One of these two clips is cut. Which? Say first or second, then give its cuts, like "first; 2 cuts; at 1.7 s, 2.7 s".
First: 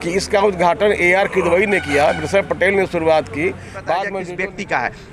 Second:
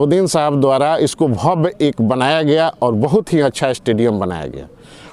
first; 1 cut; at 4.2 s